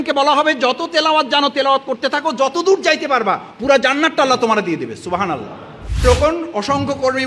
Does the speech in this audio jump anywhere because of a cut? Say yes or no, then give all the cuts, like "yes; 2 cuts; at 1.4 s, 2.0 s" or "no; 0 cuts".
yes; 1 cut; at 6.0 s